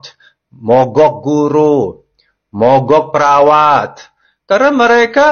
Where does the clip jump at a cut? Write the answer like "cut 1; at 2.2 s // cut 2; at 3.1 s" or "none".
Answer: none